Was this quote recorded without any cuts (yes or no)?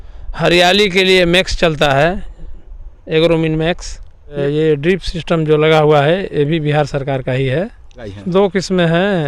no